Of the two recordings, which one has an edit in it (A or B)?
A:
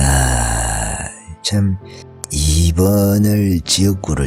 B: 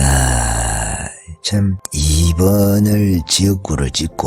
B